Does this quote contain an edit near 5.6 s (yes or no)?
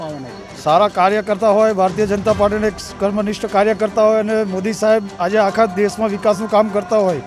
no